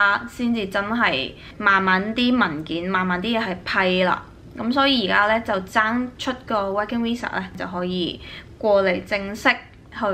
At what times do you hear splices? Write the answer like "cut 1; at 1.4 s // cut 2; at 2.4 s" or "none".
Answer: cut 1; at 7.5 s